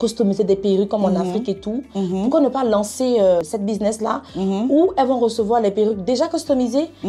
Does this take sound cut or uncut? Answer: cut